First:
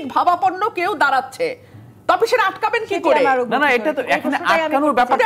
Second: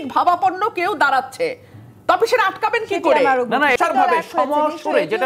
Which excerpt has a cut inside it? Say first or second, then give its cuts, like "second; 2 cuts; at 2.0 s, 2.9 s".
second; 1 cut; at 3.8 s